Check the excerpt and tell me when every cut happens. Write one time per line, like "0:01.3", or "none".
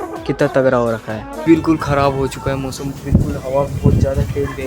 0:01.3